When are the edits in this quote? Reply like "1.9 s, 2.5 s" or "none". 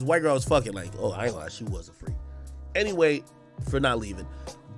3.6 s